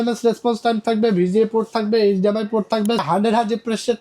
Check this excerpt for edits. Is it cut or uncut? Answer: cut